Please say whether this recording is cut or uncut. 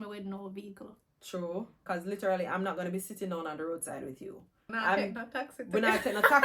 cut